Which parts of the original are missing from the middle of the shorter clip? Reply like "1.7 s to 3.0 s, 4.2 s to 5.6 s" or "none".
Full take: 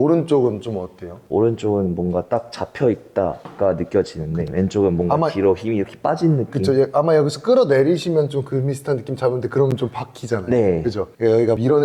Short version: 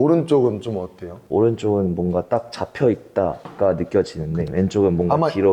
none